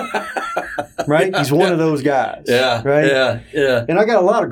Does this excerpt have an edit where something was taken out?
no; 0 cuts

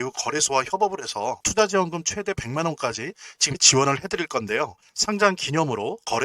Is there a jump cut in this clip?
yes; 1 cut; at 1.4 s

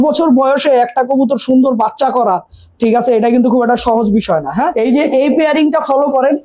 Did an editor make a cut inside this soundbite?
yes; 1 cut; at 4.7 s

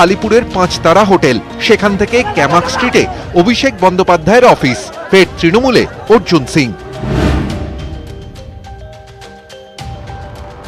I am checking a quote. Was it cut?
no; 0 cuts

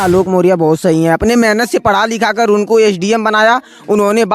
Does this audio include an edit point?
no; 0 cuts

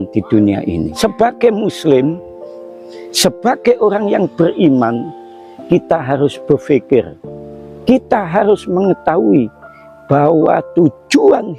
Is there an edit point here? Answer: yes; 1 cut; at 0.9 s

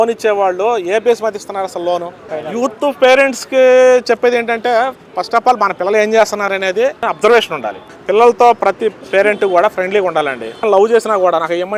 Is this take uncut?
no; 4 cuts; at 2.2 s, 7.0 s, 7.9 s, 10.6 s

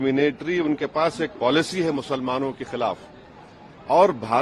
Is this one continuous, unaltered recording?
yes; 0 cuts

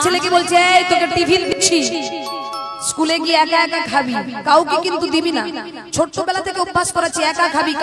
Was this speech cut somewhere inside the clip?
yes; 1 cut; at 1.5 s

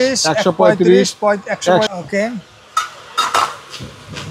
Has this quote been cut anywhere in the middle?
yes; 1 cut; at 1.9 s

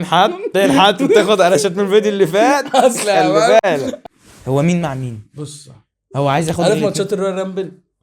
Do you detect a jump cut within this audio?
yes; 1 cut; at 4.0 s

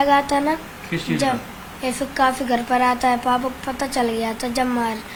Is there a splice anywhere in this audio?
no; 0 cuts

